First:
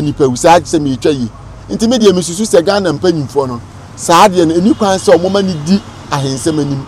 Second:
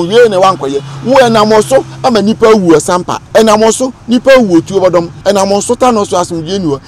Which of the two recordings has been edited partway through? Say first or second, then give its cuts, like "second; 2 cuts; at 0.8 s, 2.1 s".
second; 2 cuts; at 3.2 s, 5.1 s